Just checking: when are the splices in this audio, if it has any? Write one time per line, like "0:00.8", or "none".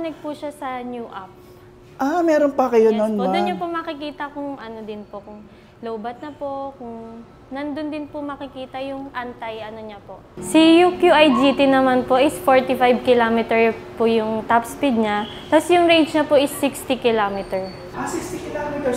0:10.4
0:17.9